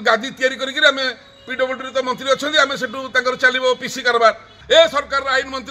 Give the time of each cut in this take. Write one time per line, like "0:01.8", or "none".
0:04.5